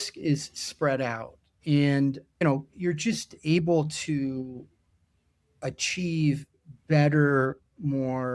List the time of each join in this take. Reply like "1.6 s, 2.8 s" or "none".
none